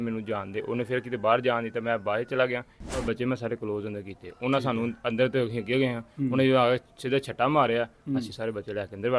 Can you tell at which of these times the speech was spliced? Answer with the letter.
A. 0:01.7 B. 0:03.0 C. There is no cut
B